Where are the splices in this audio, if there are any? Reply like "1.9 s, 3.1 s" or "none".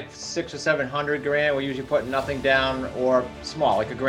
none